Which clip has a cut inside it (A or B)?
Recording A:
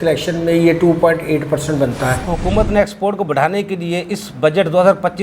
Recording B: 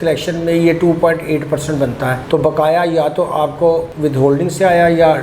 A